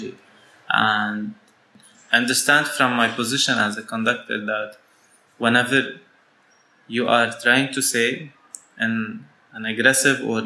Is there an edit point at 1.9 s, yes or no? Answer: yes